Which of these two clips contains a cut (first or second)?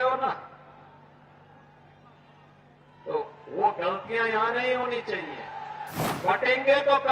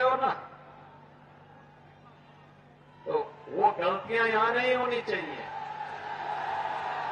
first